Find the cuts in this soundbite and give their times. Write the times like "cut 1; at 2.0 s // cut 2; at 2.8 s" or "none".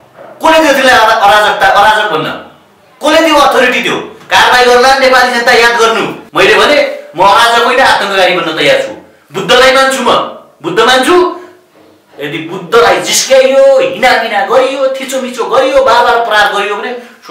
cut 1; at 6.2 s